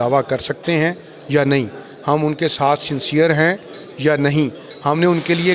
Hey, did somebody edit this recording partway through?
no; 0 cuts

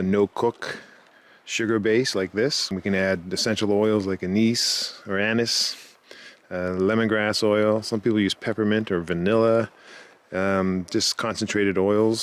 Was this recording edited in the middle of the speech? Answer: yes; 1 cut; at 2.7 s

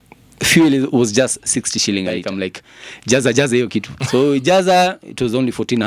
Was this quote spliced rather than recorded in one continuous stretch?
yes; 1 cut; at 2.2 s

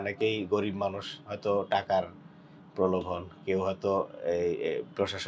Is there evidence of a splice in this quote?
no; 0 cuts

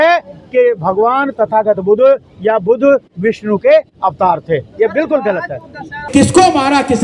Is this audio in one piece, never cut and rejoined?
no; 1 cut; at 6.1 s

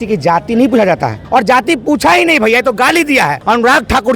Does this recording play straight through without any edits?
no; 2 cuts; at 1.2 s, 3.4 s

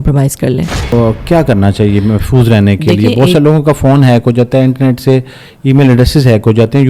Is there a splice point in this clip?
yes; 1 cut; at 0.9 s

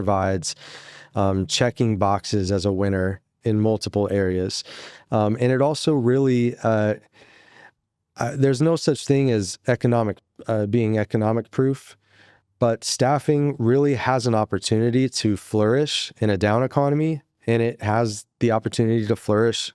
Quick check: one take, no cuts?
yes; 0 cuts

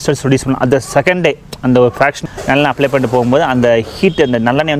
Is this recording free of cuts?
no; 1 cut; at 2.2 s

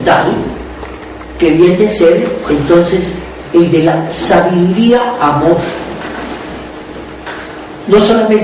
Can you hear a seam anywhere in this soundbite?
no; 0 cuts

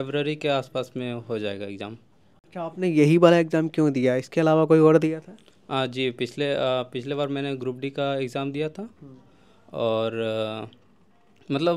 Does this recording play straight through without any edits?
yes; 0 cuts

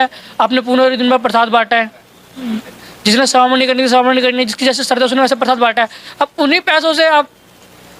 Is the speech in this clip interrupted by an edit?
no; 0 cuts

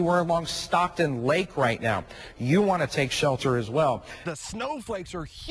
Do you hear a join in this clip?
yes; 1 cut; at 4.1 s

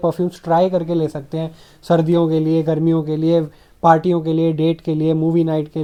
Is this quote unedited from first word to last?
yes; 0 cuts

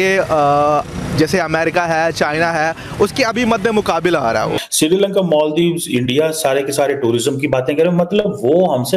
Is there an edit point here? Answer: yes; 1 cut; at 4.6 s

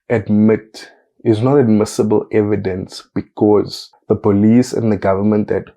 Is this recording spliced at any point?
yes; 1 cut; at 3.9 s

